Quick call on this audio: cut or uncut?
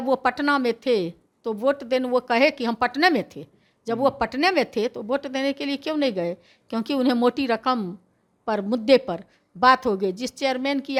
uncut